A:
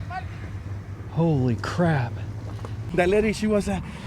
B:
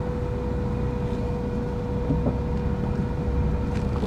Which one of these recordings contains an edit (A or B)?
A